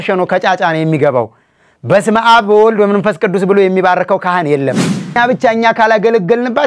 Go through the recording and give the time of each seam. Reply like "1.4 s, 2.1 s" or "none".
5.2 s